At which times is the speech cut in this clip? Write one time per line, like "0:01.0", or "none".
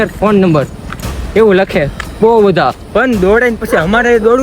0:02.8